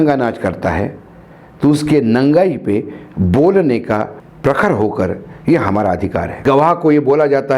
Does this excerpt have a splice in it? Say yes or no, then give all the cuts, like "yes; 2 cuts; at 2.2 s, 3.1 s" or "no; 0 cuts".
yes; 1 cut; at 6.4 s